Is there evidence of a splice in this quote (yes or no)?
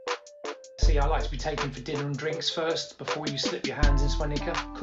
yes